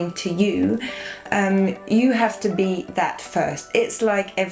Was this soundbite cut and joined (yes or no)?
no